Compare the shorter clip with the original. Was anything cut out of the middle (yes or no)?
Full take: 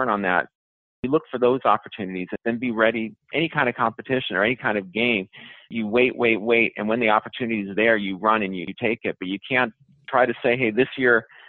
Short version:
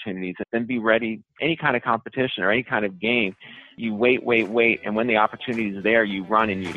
no